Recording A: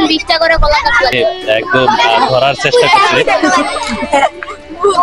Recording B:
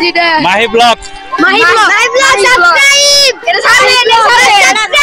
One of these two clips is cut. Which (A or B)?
A